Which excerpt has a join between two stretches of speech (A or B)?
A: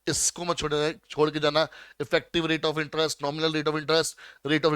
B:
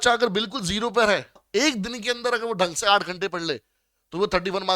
B